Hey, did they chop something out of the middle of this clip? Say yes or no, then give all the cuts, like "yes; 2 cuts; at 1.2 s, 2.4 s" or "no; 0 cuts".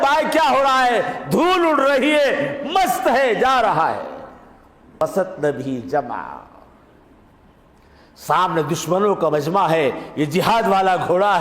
yes; 1 cut; at 5.0 s